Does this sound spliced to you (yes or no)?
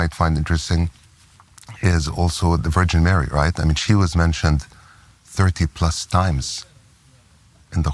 no